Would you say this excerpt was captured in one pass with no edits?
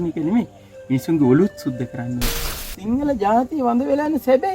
no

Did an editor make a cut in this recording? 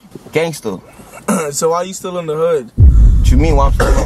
no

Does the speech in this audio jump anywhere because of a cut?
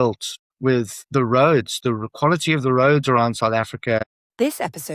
yes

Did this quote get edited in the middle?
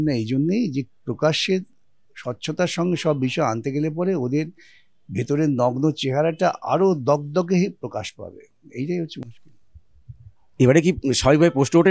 no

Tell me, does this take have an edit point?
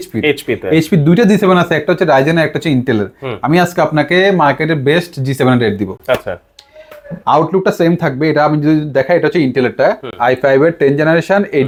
no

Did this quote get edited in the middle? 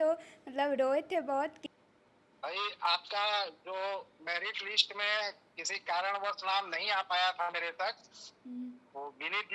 yes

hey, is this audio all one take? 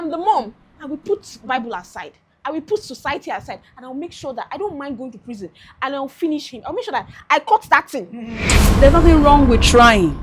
no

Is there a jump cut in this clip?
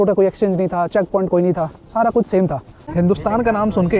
yes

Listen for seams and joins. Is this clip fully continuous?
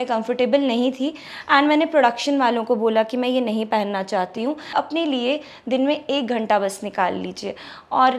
no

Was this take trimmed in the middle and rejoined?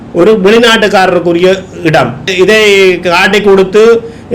yes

